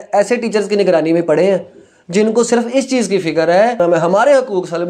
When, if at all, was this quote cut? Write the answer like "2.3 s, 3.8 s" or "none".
3.8 s